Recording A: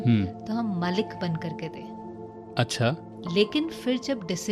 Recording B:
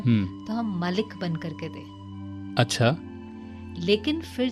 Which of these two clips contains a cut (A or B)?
A